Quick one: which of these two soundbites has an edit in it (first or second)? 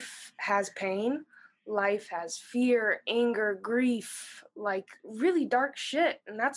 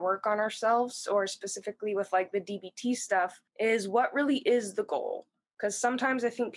second